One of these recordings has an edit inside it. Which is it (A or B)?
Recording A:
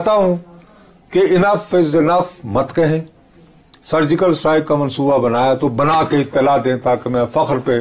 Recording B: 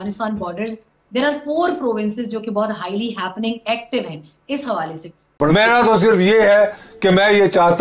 B